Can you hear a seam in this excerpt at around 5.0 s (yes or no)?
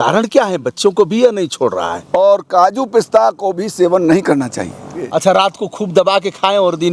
yes